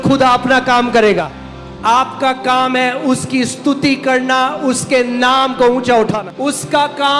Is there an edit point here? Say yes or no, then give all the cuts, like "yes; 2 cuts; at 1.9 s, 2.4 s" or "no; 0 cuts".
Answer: yes; 2 cuts; at 1.3 s, 6.2 s